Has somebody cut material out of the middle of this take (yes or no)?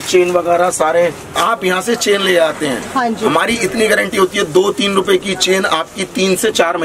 yes